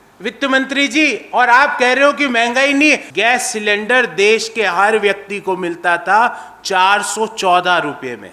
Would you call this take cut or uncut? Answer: cut